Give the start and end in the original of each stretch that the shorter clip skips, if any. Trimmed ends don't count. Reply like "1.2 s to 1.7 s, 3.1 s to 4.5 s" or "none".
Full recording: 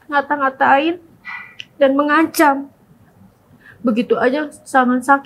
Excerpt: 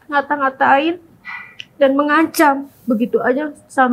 2.7 s to 3.7 s